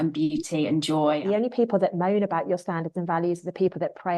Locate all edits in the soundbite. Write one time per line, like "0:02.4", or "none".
0:01.2

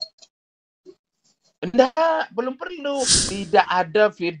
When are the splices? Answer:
0:03.1

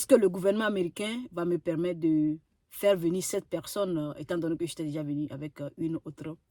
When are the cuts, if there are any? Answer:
none

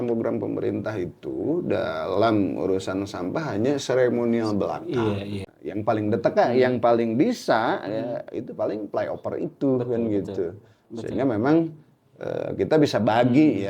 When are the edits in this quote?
0:05.4

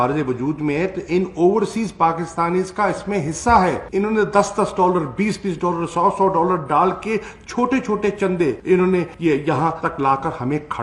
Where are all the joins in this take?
none

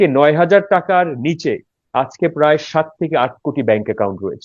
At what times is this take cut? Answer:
none

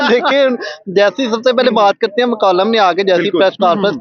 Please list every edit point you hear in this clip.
none

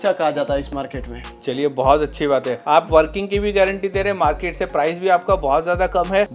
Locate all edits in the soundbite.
none

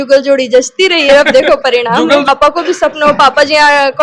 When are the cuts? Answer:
0:02.3

